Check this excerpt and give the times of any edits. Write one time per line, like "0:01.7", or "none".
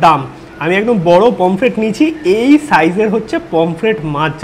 none